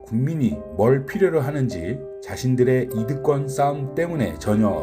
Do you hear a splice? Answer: no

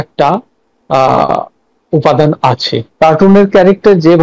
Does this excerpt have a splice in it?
yes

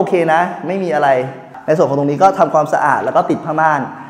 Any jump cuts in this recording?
yes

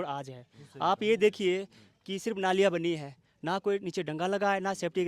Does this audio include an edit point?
no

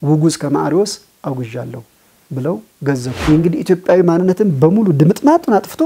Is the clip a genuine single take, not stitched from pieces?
no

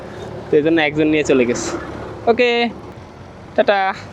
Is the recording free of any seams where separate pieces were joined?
no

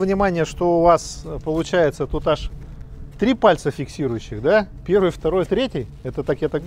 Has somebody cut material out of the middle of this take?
no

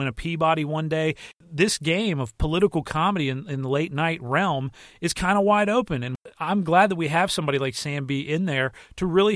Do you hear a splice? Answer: yes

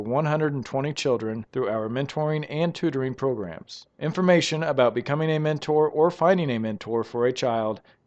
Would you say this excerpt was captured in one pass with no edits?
yes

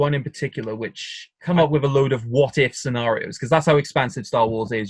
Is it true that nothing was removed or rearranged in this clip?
no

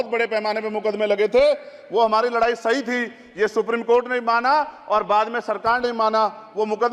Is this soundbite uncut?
yes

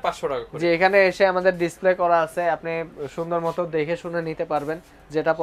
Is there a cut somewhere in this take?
no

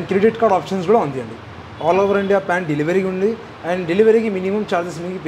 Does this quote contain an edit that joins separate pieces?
no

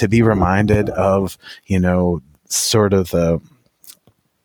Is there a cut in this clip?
no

